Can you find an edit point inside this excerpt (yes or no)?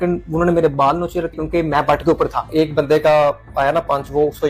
yes